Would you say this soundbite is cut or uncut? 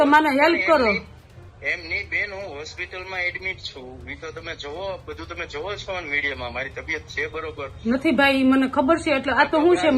uncut